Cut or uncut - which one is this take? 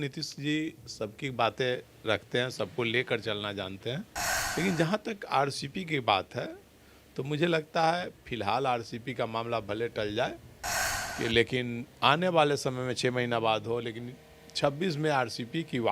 uncut